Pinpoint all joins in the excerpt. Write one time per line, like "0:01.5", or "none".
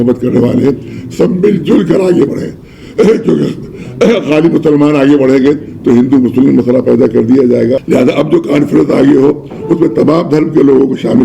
0:07.8